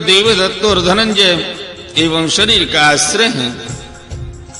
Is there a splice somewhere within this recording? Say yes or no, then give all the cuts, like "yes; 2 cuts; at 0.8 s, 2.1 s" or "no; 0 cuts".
yes; 1 cut; at 3.7 s